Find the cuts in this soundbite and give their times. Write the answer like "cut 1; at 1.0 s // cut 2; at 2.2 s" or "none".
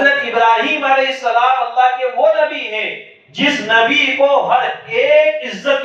none